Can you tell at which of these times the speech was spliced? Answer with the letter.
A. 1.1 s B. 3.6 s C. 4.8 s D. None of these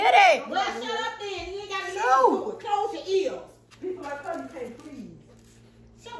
B